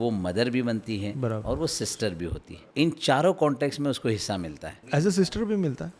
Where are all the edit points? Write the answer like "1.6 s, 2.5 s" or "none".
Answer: 2.4 s, 5.0 s